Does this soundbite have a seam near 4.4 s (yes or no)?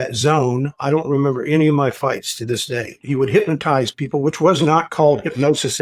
no